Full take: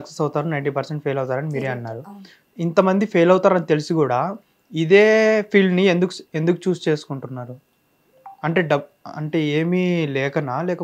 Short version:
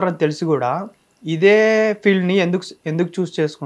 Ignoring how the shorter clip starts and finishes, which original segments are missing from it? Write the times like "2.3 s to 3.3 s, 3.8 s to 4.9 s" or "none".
none